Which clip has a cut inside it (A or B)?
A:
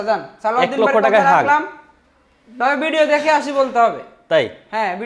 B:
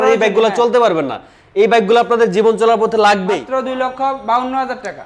B